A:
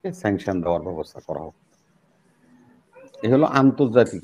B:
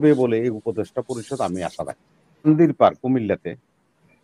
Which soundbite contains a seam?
B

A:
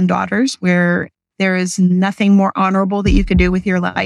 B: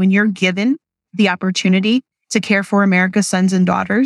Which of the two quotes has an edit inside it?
B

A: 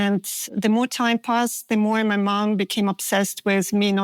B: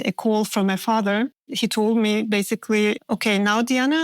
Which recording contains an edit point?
B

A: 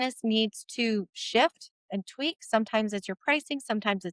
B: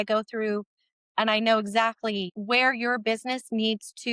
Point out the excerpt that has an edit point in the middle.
B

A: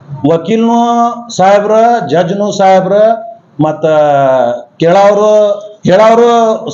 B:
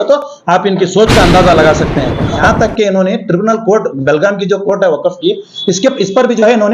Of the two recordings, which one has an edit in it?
B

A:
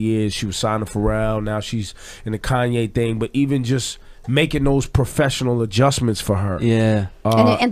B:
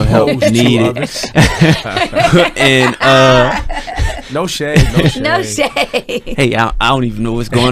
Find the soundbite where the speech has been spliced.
A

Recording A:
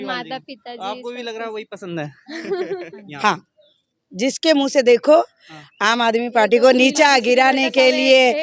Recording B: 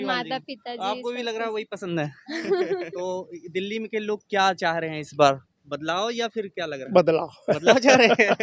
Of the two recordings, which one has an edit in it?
A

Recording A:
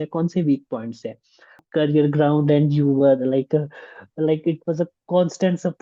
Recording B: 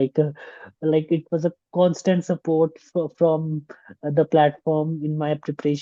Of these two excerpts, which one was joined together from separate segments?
A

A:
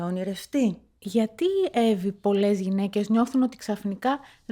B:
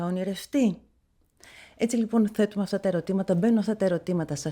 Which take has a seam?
A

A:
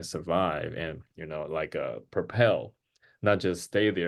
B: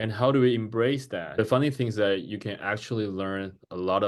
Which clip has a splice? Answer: B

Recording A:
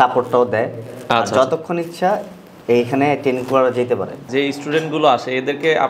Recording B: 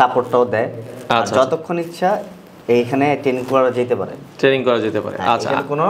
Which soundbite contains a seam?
A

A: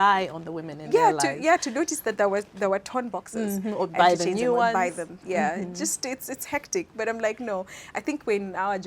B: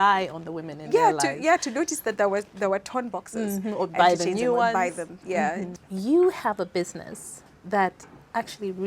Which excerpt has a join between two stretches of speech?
B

